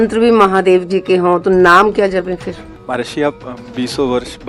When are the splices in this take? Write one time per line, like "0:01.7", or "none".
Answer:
0:02.7